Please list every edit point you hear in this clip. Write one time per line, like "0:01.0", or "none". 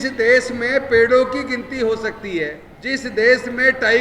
0:02.7